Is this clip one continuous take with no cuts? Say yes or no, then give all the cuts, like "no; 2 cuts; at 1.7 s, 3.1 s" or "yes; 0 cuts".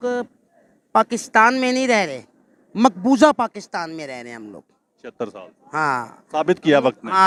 yes; 0 cuts